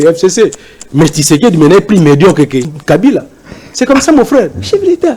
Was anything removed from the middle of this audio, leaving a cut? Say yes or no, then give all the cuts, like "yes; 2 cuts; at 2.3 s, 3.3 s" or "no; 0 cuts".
yes; 1 cut; at 2.7 s